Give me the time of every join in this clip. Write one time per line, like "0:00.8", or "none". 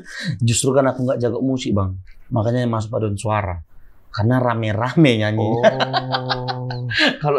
none